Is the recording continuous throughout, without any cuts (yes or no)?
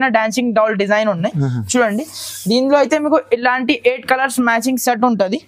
yes